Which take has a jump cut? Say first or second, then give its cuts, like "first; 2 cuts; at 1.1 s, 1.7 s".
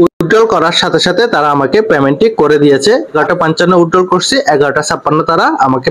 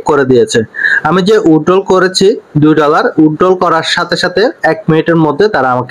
first; 1 cut; at 3.1 s